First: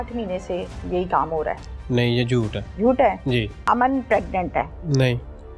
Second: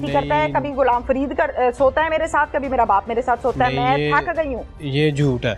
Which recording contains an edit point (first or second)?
first